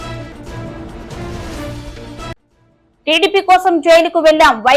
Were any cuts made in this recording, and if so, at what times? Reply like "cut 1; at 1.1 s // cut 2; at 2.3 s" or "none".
cut 1; at 2.5 s